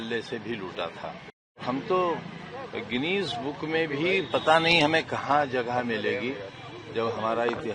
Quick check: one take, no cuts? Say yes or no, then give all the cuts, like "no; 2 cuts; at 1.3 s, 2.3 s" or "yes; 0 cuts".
no; 1 cut; at 1.6 s